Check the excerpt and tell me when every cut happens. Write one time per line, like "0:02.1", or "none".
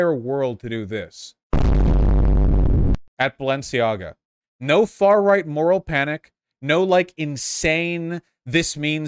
0:03.1